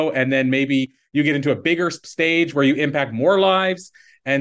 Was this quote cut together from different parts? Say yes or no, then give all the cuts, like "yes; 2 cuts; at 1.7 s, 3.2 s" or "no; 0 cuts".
yes; 1 cut; at 2.0 s